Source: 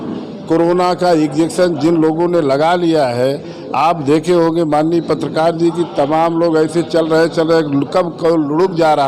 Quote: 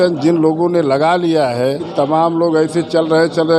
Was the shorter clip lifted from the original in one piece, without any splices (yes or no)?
no